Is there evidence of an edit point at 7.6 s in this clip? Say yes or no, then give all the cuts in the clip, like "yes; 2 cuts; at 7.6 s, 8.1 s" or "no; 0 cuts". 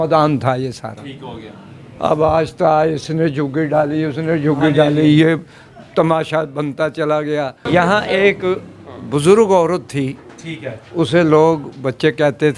yes; 1 cut; at 7.6 s